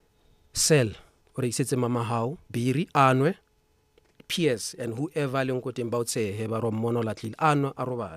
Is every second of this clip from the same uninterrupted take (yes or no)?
yes